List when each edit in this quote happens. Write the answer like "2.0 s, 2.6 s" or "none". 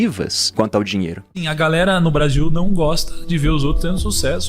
1.2 s